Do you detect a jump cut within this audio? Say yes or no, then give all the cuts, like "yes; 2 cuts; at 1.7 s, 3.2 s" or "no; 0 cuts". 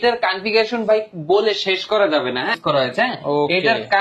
yes; 1 cut; at 2.6 s